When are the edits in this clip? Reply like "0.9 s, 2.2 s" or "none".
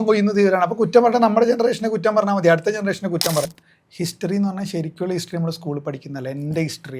3.4 s

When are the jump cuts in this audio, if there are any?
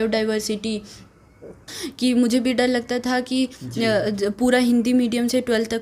1.8 s

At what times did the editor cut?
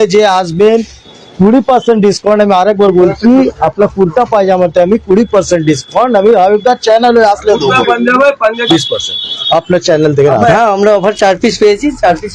8.6 s, 10.5 s

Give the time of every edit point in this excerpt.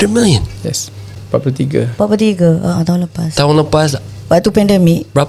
1.1 s

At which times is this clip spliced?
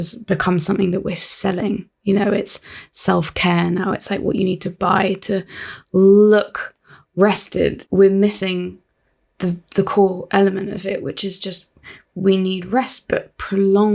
none

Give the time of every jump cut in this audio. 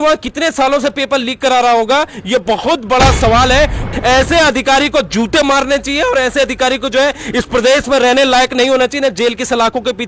3.9 s

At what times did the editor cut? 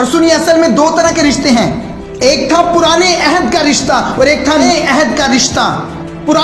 4.7 s

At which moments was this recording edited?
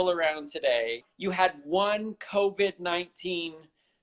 1.1 s

